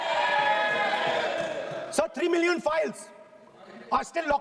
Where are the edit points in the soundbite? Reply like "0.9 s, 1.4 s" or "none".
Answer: none